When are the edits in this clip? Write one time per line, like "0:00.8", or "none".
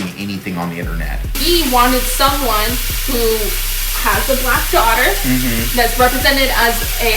0:01.4